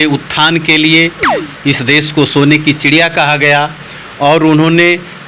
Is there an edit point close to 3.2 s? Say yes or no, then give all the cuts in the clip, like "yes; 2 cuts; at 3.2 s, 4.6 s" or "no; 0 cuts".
no; 1 cut; at 1.4 s